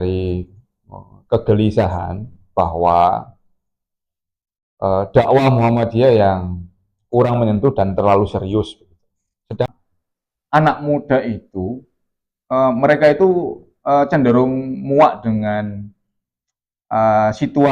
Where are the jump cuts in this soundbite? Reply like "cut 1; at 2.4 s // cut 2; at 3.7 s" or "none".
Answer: cut 1; at 9.7 s

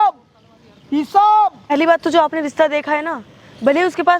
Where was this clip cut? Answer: cut 1; at 1.7 s

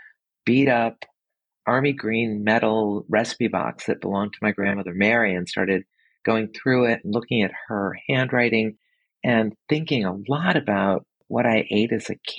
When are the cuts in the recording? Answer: cut 1; at 11.2 s

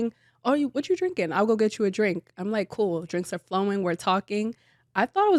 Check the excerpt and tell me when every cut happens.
none

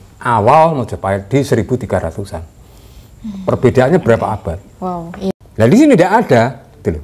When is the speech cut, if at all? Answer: cut 1; at 5.3 s

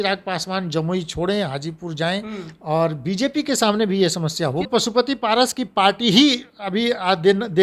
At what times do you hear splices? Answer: cut 1; at 4.7 s

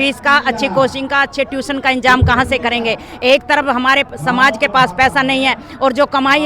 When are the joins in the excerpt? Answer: none

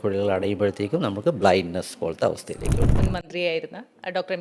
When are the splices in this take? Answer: cut 1; at 2.9 s

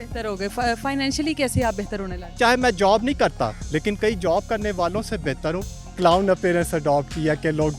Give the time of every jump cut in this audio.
cut 1; at 2.2 s // cut 2; at 3.6 s // cut 3; at 5.8 s

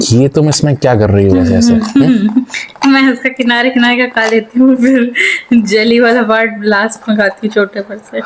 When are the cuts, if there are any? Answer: none

